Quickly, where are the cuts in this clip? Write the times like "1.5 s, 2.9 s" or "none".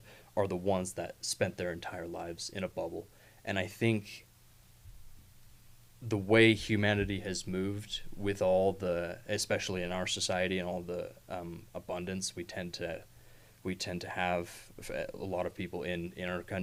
none